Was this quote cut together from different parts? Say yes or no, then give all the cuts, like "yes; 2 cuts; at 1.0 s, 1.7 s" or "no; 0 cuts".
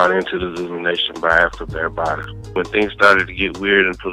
yes; 1 cut; at 2.5 s